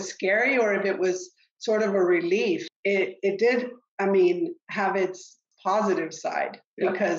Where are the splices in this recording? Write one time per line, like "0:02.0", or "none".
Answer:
0:02.7
0:05.5